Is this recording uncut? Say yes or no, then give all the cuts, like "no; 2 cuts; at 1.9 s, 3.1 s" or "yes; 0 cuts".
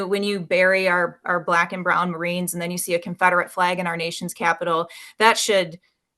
yes; 0 cuts